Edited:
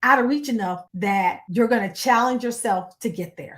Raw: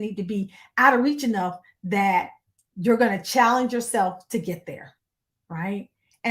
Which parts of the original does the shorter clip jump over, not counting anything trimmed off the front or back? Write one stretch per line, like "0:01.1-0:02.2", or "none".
0:01.8-0:02.3